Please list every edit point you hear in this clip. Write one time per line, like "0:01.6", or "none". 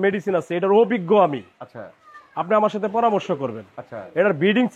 none